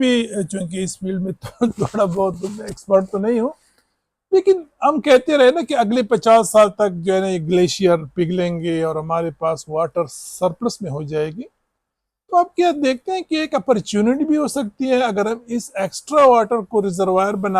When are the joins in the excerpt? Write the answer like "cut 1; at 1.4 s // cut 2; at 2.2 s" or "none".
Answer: none